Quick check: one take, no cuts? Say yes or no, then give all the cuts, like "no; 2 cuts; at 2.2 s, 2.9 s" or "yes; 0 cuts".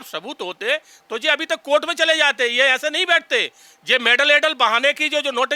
yes; 0 cuts